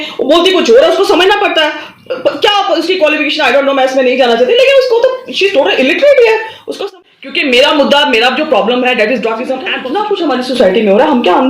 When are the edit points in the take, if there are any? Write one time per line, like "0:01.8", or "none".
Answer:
0:06.8
0:09.9

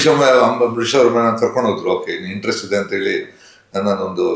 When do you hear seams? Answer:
none

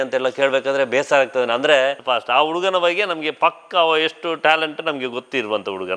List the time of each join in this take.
0:02.0

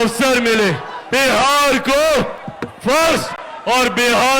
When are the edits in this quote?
0:00.9

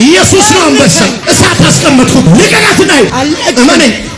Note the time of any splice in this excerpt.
0:01.2
0:02.3
0:03.1

